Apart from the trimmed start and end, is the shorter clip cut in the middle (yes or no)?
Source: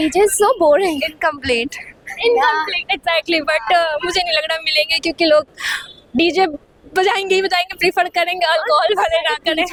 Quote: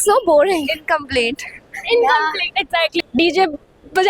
yes